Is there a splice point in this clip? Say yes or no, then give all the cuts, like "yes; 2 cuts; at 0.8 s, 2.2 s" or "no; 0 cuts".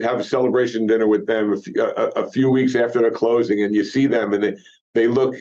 no; 0 cuts